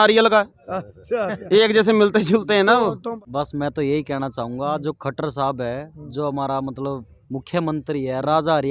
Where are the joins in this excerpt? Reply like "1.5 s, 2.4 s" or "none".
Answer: 3.2 s